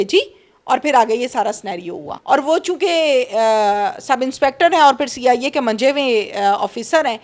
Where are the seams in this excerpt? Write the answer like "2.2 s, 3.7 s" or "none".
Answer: 2.1 s